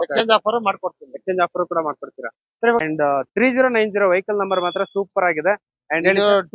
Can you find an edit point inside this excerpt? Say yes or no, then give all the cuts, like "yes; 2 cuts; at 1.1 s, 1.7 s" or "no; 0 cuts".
yes; 1 cut; at 2.8 s